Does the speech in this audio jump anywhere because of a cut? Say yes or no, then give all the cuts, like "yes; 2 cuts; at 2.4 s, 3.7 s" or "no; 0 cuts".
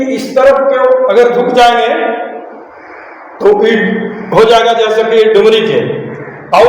no; 0 cuts